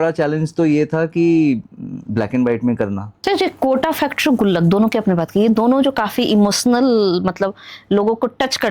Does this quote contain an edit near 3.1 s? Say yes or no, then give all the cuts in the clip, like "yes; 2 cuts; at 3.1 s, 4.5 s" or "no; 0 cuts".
yes; 1 cut; at 3.1 s